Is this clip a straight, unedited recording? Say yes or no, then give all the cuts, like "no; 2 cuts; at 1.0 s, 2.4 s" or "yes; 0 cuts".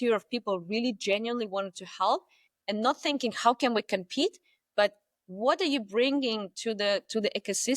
yes; 0 cuts